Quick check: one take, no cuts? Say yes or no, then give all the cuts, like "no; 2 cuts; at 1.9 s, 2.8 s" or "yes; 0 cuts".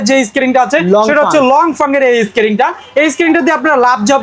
yes; 0 cuts